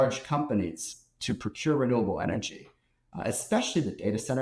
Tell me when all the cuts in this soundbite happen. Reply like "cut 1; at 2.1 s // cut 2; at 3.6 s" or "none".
none